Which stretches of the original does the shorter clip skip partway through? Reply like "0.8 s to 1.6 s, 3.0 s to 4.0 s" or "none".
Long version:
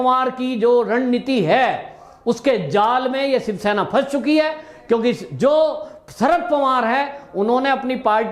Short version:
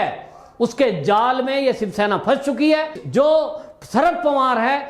4.7 s to 5.3 s

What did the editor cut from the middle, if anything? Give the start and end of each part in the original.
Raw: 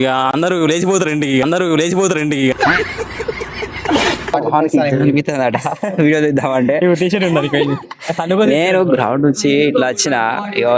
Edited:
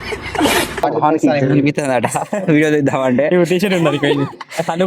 none

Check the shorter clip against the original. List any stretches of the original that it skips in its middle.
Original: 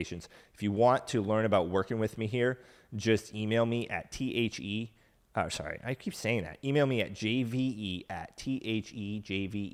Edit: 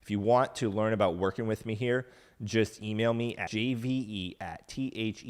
4.0 s to 7.1 s

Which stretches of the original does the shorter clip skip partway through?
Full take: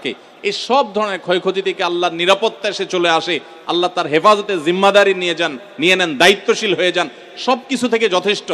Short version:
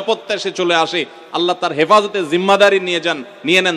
none

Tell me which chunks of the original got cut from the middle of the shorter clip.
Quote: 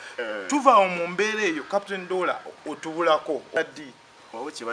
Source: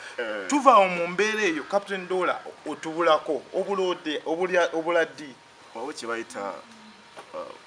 3.6 s to 5.0 s

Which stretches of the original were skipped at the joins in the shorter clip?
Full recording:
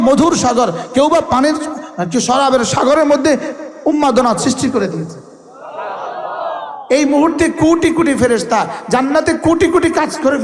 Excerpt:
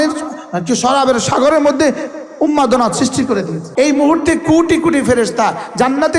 5.1 s to 6.7 s

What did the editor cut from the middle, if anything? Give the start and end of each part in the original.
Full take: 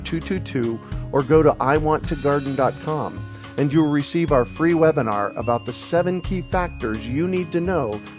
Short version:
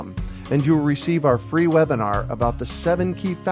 none

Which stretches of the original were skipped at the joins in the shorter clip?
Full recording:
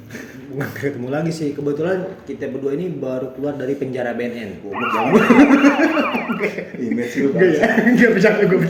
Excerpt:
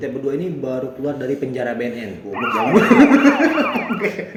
none

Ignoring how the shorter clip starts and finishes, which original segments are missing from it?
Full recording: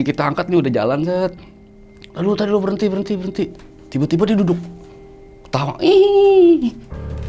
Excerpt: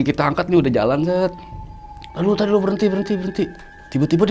none

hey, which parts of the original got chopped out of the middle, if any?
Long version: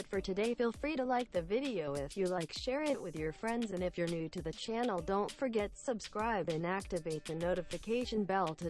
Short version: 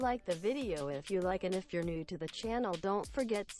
2.7 s to 3.8 s

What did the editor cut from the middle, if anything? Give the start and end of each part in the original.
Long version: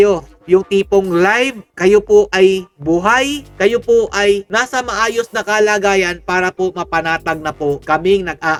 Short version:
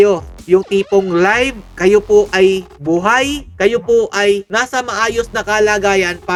none

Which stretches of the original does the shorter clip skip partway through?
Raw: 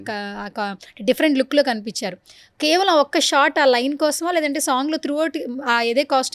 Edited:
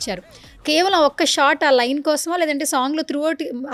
none

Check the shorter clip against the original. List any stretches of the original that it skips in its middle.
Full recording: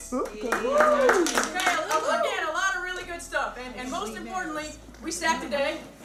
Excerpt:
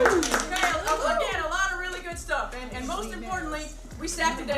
none

